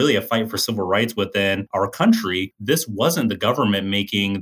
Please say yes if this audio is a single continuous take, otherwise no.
no